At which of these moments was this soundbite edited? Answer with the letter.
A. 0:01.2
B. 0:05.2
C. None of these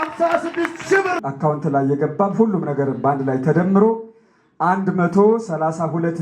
A